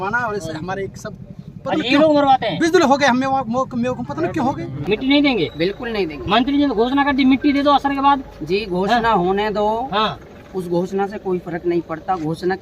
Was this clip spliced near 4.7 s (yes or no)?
yes